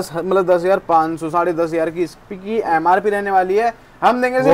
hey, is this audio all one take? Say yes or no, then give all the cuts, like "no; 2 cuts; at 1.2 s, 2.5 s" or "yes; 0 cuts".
yes; 0 cuts